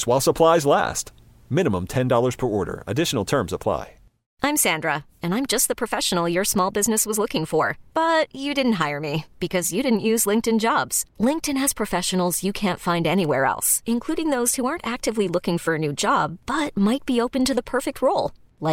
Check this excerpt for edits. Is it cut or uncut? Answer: cut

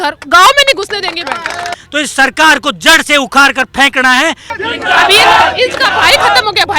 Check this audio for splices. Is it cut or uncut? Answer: cut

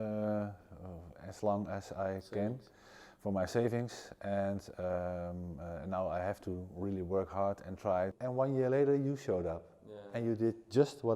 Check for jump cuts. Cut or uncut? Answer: cut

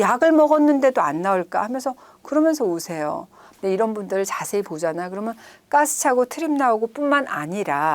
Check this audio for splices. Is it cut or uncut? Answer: cut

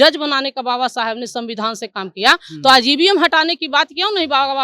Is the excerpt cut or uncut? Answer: uncut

